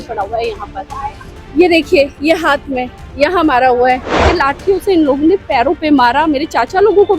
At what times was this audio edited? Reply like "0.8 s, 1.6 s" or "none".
4.2 s